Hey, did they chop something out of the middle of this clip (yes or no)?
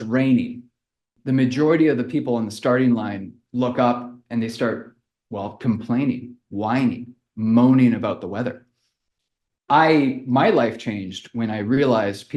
yes